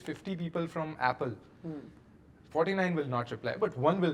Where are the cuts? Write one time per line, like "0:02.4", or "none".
none